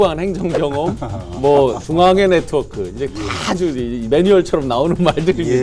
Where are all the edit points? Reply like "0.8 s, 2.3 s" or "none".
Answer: none

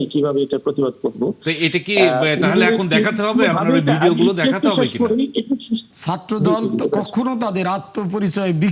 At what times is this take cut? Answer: 5.9 s

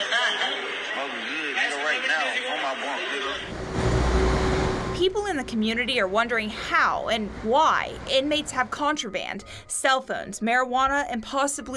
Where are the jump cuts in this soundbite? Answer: 3.4 s

